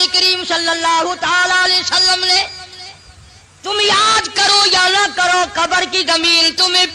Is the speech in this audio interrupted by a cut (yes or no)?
no